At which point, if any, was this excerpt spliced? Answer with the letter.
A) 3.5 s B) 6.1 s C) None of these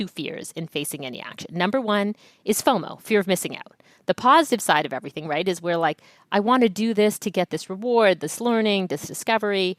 C